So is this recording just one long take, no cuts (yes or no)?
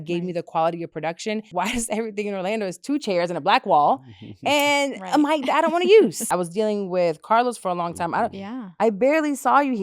no